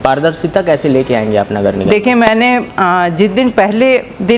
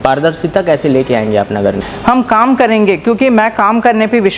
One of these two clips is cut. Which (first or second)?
second